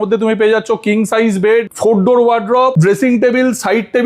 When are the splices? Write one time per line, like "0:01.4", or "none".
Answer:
0:01.7
0:02.7